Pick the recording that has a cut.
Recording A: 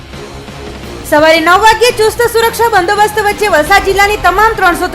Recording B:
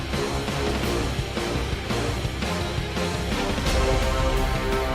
A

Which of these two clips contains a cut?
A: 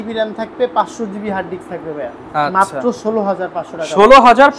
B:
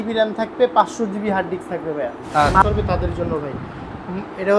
B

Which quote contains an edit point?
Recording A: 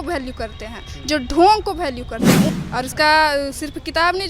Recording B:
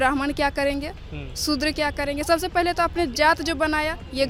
A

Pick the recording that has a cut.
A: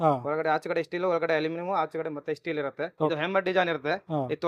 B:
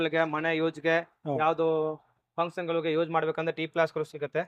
A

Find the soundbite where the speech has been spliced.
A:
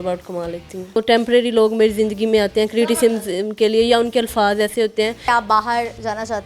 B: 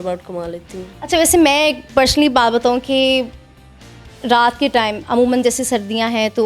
A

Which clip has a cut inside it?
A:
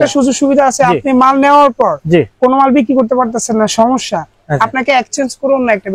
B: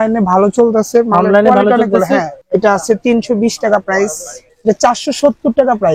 B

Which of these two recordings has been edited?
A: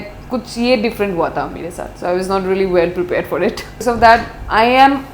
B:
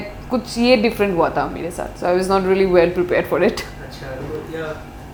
A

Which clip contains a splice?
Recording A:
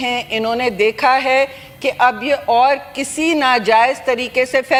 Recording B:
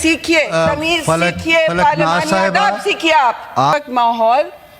B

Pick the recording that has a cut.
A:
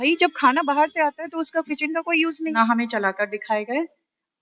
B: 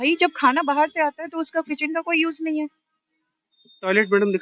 A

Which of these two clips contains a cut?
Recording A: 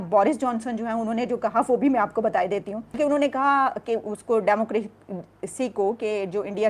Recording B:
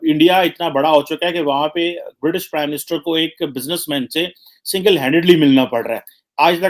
A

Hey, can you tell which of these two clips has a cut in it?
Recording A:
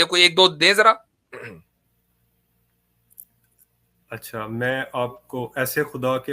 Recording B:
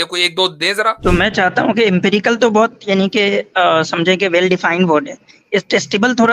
B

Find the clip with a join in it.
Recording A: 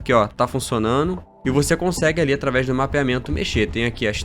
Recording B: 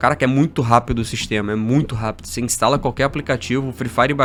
A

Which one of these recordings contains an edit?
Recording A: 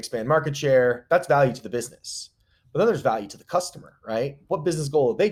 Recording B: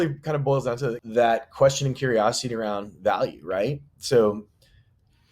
B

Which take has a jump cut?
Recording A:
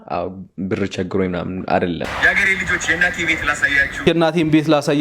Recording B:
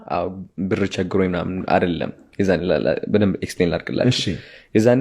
A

